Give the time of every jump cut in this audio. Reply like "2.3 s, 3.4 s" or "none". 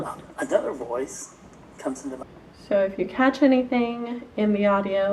2.2 s